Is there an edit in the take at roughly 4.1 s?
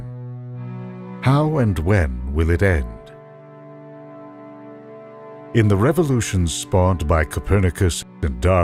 no; 1 cut; at 2.7 s

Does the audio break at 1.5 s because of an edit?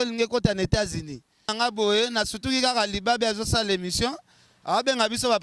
yes; 1 cut; at 1.5 s

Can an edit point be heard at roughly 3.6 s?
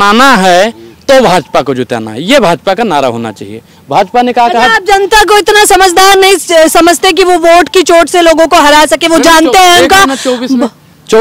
no; 0 cuts

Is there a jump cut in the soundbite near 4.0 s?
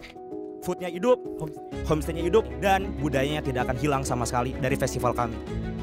no; 1 cut; at 2.5 s

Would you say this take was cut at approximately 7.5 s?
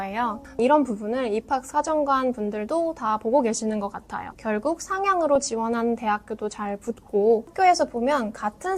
yes; 2 cuts; at 4.3 s, 7.5 s

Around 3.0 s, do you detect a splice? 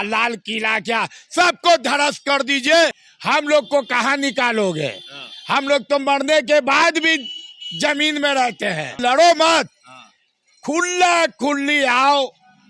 yes; 2 cuts; at 3.0 s, 9.0 s

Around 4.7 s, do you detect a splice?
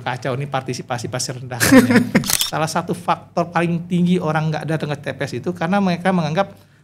no; 1 cut; at 2.3 s

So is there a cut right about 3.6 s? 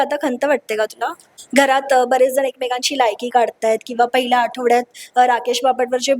no; 1 cut; at 1.2 s

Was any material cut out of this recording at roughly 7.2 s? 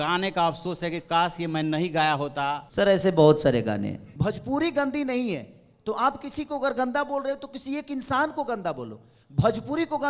no; 2 cuts; at 2.7 s, 4.1 s

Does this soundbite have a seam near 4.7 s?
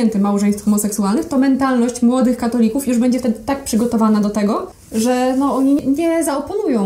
yes; 2 cuts; at 4.7 s, 5.8 s

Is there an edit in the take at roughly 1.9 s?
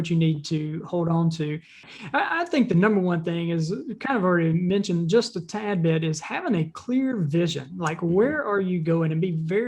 yes; 1 cut; at 1.9 s

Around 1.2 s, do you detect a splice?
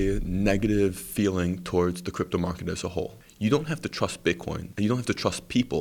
no; 2 cuts; at 3.2 s, 4.6 s

